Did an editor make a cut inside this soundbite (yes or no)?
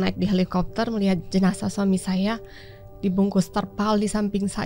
no